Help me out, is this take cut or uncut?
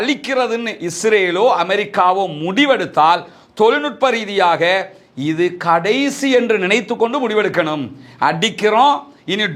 uncut